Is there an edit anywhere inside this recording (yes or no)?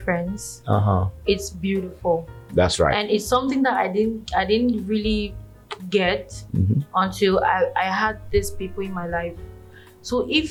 no